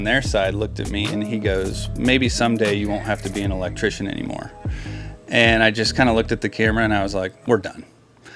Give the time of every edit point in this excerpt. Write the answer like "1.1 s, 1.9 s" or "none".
none